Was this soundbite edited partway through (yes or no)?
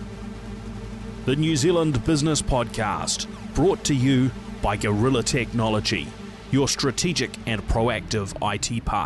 no